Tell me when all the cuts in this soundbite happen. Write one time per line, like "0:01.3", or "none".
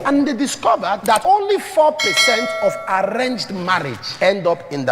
0:01.1
0:04.0